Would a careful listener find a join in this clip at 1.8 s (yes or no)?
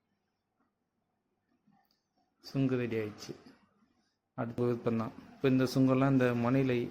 no